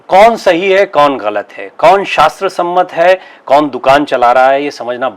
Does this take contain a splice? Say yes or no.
no